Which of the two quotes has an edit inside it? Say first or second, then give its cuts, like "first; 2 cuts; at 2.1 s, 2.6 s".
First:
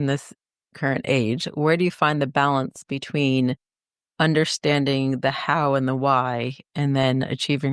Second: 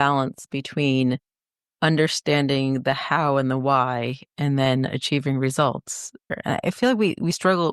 second; 1 cut; at 6.3 s